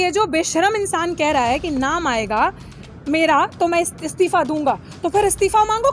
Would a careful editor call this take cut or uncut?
uncut